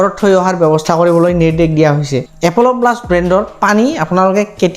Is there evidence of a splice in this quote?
yes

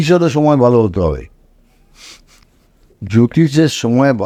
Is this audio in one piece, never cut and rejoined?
yes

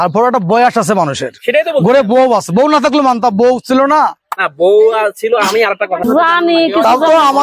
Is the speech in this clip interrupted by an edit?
yes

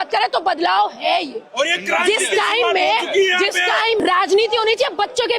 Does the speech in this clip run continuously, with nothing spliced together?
no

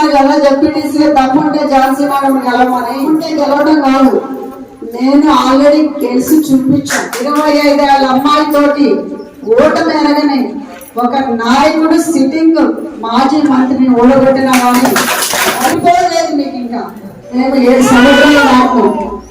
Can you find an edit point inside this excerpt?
yes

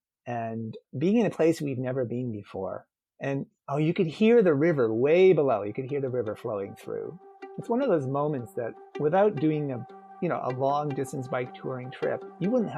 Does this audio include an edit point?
no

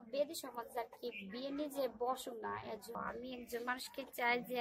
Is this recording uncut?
no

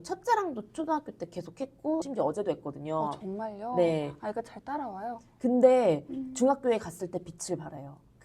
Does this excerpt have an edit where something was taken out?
yes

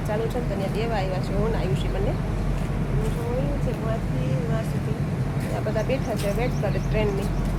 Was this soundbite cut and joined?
no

